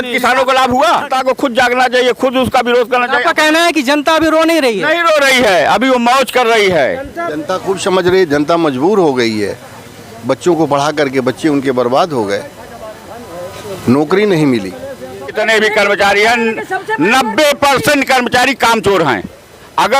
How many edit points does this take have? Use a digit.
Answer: 3